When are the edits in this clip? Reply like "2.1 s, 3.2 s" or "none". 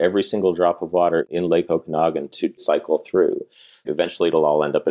1.3 s, 2.6 s, 3.9 s